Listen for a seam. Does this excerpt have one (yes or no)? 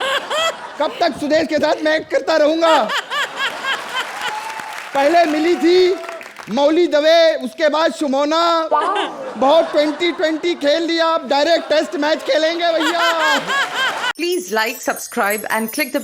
yes